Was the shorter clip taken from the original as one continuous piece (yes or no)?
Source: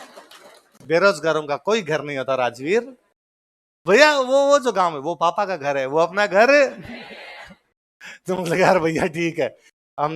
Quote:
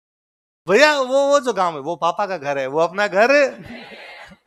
yes